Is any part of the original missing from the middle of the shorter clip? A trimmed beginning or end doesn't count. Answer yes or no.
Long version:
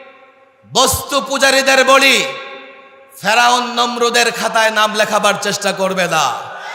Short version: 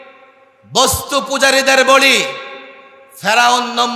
no